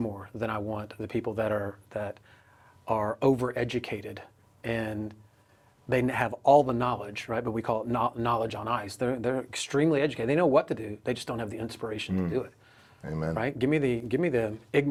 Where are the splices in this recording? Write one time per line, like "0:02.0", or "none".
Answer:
none